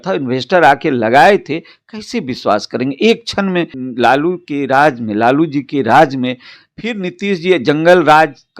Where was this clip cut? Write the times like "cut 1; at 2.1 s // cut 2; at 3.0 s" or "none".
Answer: cut 1; at 3.8 s